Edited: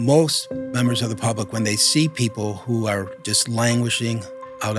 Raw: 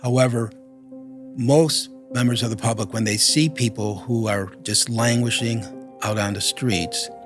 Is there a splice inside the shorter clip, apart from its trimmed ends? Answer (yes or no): no